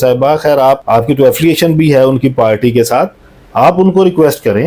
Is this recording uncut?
yes; 0 cuts

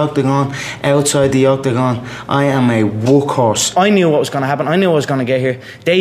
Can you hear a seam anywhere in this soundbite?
yes; 1 cut; at 3.7 s

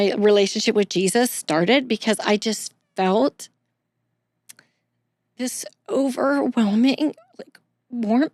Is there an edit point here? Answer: no; 0 cuts

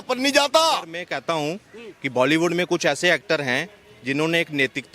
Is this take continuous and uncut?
no; 1 cut; at 1.1 s

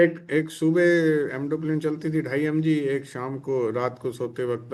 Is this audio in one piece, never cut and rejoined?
yes; 0 cuts

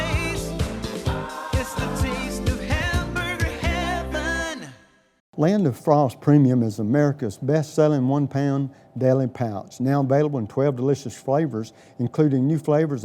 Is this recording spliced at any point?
yes; 1 cut; at 5.2 s

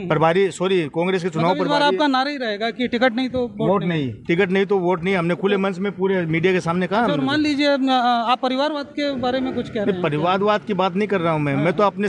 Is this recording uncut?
yes; 0 cuts

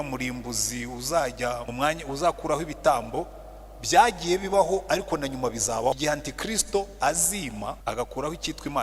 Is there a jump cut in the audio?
yes; 3 cuts; at 1.7 s, 6.0 s, 7.8 s

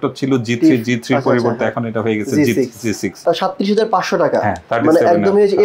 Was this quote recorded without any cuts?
no; 1 cut; at 3.2 s

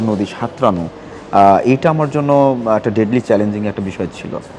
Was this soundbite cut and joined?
no; 0 cuts

